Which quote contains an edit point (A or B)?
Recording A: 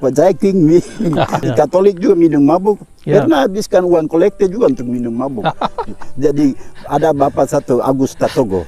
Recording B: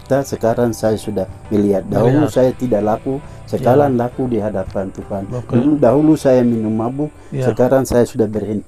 A